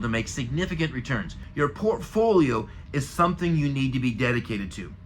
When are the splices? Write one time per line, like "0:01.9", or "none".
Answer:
0:01.4